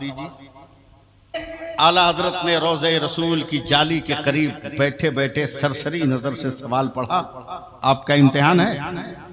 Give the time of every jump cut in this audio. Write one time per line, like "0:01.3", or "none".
0:01.5

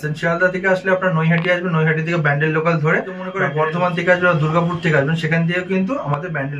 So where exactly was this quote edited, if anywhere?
0:03.4

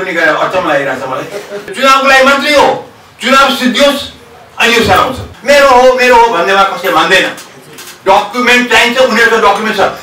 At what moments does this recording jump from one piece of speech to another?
0:01.7
0:05.3

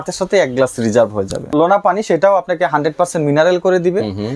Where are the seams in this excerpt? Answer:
0:01.4

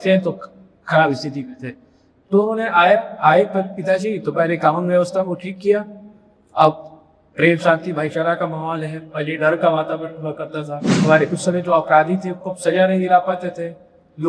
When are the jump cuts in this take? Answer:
0:10.8

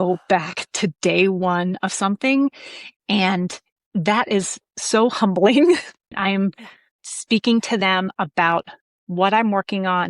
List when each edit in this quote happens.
0:06.1

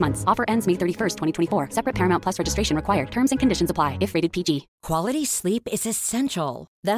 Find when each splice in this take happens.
0:04.7

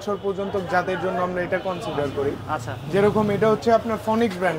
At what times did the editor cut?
none

